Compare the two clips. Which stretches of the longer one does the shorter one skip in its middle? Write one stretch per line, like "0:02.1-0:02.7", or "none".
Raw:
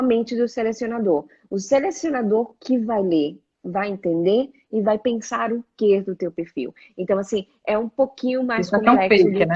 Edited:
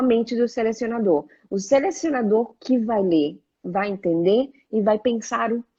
none